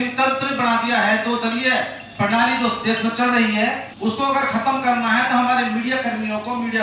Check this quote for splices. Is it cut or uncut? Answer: cut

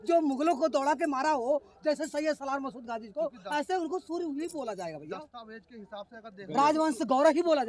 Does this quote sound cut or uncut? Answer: uncut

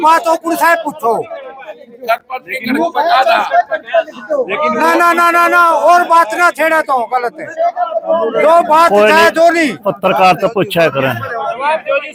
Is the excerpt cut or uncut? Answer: uncut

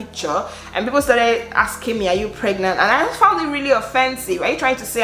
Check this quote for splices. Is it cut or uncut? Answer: uncut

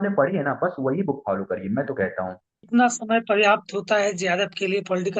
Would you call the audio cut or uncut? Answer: cut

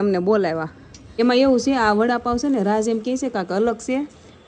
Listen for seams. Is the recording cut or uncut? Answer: cut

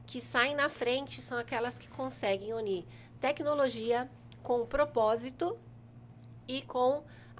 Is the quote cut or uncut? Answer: uncut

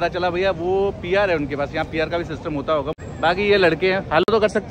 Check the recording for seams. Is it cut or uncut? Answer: uncut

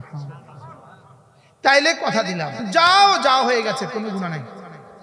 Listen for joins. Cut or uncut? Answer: cut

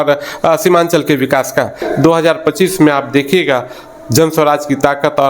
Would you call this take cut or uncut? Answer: cut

